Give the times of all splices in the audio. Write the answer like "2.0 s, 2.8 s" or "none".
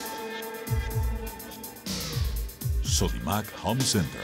1.1 s